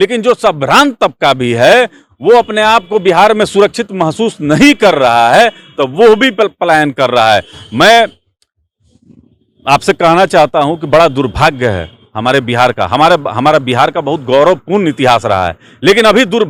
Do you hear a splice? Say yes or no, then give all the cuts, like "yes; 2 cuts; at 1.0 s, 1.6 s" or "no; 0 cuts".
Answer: no; 0 cuts